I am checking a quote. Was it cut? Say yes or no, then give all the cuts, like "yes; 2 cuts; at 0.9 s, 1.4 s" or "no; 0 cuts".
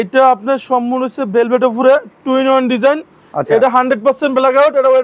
no; 0 cuts